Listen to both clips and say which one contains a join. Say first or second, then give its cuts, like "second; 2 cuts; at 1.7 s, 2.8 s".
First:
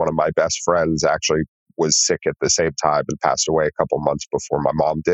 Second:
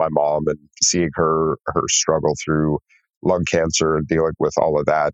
first; 1 cut; at 1.6 s